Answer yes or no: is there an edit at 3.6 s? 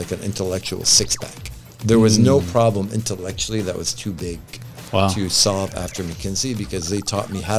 no